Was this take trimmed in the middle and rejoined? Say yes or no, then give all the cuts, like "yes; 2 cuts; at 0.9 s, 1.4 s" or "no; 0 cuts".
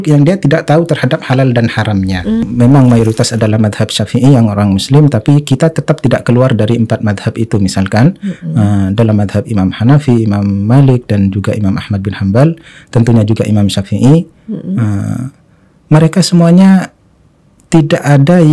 yes; 1 cut; at 2.4 s